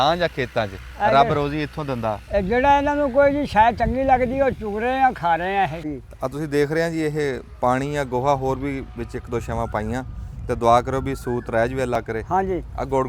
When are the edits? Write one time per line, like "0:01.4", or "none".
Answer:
0:05.9